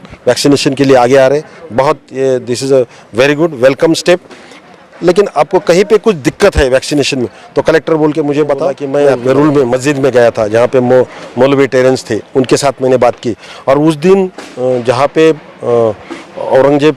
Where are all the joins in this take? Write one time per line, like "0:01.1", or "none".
0:08.8